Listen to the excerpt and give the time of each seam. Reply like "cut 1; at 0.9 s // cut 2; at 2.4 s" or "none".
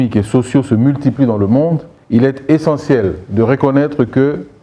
cut 1; at 1.9 s